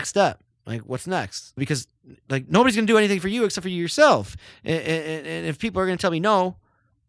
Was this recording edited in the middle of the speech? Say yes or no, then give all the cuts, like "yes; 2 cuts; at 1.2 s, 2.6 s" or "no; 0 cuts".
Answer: yes; 1 cut; at 1.6 s